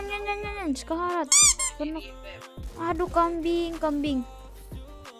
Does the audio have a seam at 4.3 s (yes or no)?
yes